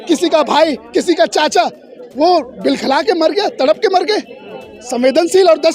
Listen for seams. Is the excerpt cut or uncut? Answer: uncut